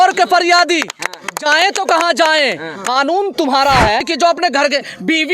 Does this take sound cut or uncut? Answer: cut